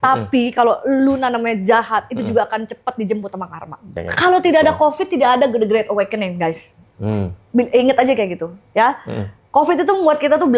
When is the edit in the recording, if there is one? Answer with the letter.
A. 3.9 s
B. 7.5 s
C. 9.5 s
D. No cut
A